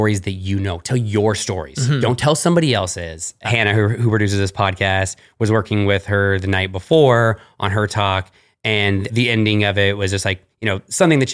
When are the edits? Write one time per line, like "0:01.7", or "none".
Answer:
0:03.4
0:09.1